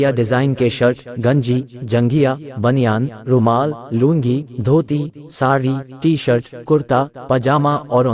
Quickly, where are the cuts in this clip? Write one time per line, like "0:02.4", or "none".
none

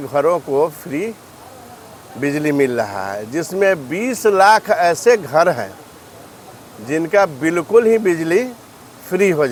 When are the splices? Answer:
none

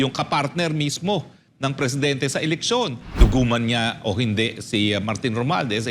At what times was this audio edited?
0:03.1

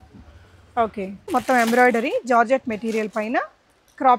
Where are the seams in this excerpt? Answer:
0:01.3

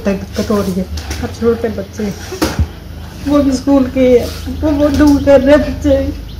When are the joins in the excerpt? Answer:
none

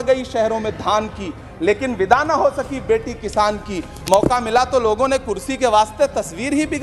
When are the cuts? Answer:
none

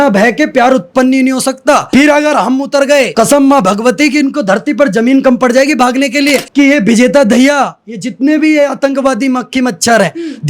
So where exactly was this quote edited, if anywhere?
0:01.8
0:03.1
0:06.4

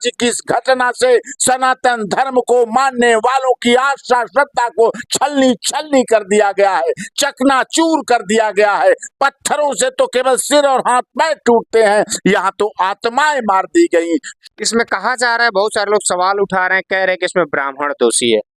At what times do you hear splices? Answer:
0:14.4

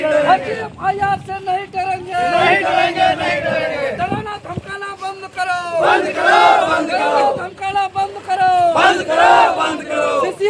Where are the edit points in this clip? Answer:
none

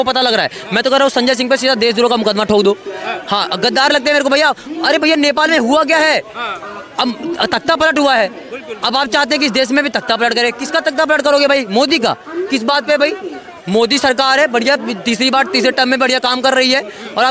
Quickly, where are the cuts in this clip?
none

